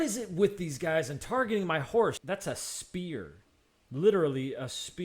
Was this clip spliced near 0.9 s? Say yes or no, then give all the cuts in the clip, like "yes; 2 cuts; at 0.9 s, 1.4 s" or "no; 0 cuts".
no; 1 cut; at 2.2 s